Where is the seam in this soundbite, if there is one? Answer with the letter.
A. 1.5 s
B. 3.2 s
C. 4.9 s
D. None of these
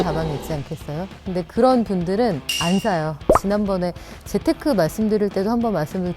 B